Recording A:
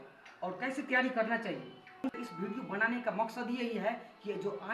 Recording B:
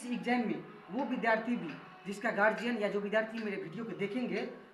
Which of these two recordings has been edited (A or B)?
A